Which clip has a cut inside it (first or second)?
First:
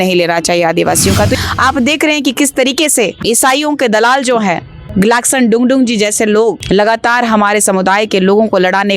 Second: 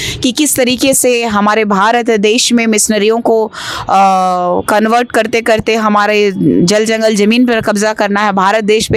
first